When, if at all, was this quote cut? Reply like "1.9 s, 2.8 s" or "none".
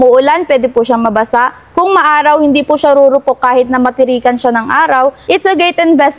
5.2 s